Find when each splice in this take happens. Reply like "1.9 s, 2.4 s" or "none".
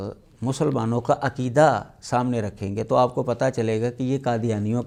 none